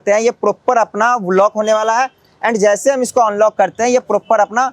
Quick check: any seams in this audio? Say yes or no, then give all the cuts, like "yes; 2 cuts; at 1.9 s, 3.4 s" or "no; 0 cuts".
no; 0 cuts